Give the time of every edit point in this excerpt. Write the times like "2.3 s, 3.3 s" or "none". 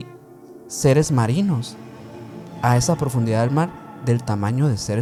none